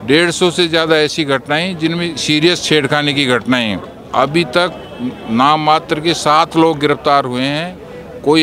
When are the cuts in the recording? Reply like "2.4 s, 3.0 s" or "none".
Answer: 4.0 s